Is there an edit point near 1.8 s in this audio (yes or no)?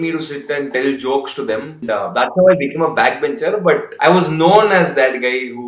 yes